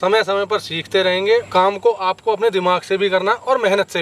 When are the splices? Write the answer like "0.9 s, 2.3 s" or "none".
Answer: 1.5 s